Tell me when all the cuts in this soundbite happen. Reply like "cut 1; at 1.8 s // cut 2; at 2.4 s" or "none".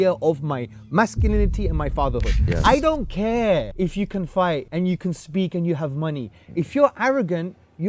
cut 1; at 2.4 s // cut 2; at 3.7 s // cut 3; at 4.7 s